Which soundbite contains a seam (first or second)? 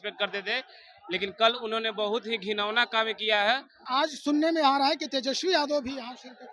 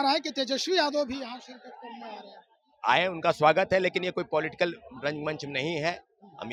first